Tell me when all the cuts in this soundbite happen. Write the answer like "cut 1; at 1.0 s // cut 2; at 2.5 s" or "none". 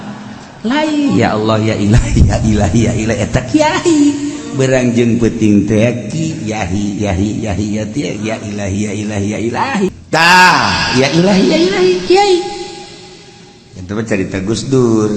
cut 1; at 10.0 s